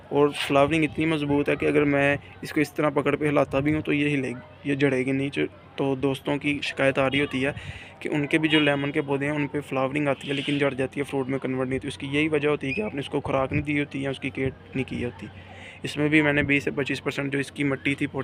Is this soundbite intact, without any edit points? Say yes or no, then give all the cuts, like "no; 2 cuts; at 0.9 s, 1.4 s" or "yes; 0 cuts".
yes; 0 cuts